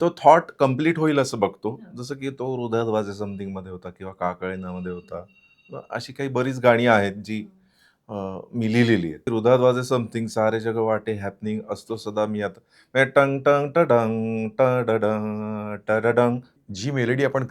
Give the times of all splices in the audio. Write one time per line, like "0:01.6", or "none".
0:09.3
0:16.3